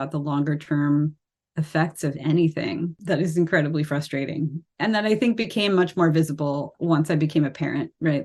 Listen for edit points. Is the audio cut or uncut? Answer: cut